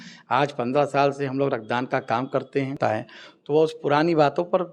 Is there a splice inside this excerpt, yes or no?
yes